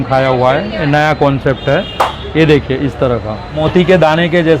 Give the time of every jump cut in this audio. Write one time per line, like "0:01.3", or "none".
0:03.6